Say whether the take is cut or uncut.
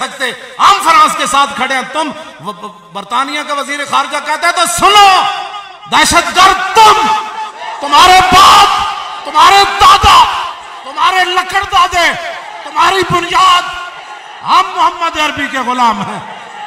uncut